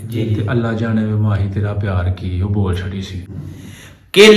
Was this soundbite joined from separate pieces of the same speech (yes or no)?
yes